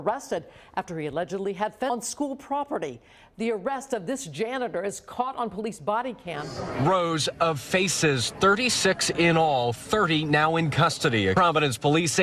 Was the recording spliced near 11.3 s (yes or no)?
yes